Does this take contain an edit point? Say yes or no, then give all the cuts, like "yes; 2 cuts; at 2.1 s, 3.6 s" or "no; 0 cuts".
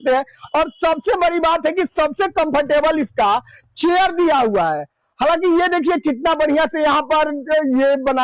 no; 0 cuts